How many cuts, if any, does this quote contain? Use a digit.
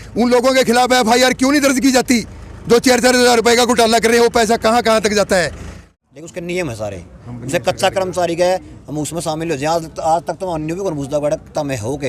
1